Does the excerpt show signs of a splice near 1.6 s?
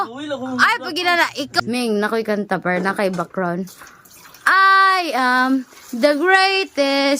yes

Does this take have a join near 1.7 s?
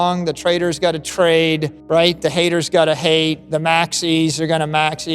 yes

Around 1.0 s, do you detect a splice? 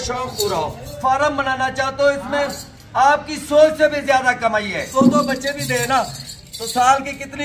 yes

